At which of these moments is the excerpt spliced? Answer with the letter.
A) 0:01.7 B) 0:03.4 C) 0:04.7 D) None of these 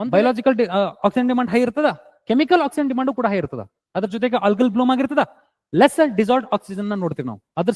D